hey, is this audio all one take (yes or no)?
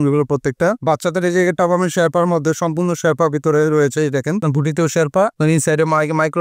no